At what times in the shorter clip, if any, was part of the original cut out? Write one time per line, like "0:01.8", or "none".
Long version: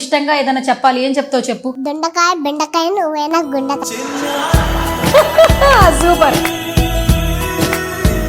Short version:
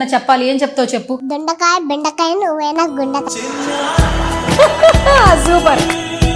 none